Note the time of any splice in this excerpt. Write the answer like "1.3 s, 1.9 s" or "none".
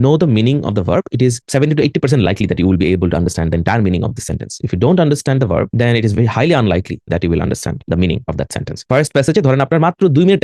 8.8 s